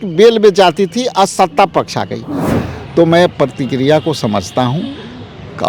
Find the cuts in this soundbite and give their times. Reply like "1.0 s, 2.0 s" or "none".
2.5 s